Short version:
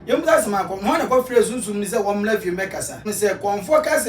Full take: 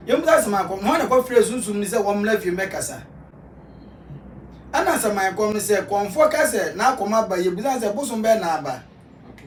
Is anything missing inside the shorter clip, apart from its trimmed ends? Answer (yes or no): yes